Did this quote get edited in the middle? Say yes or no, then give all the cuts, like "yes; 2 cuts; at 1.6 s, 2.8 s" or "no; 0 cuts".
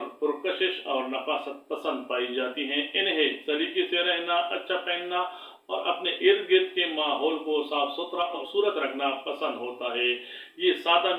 no; 0 cuts